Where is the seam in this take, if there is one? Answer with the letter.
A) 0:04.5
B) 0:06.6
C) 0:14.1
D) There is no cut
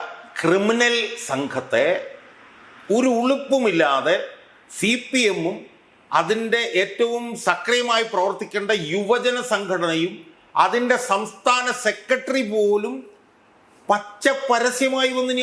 D